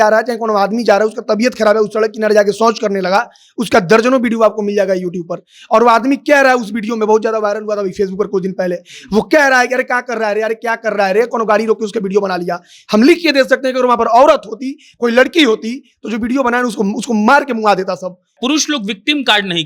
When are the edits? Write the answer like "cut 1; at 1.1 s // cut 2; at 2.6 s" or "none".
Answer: cut 1; at 18.4 s